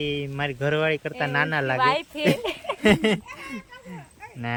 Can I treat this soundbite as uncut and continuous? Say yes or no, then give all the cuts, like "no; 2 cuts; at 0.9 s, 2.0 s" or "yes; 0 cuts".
yes; 0 cuts